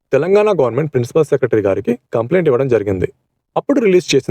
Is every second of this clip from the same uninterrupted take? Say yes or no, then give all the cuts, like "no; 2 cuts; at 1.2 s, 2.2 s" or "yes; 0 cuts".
yes; 0 cuts